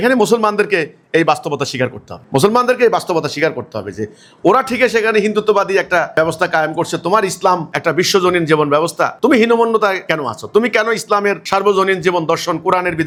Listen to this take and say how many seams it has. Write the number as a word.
zero